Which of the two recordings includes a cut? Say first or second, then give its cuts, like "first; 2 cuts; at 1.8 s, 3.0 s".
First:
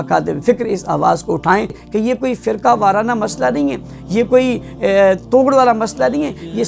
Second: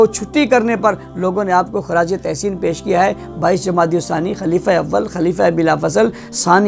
first; 1 cut; at 1.8 s